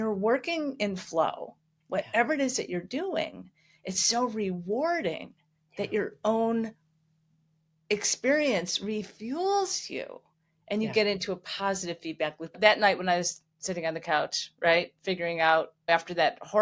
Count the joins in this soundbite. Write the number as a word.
two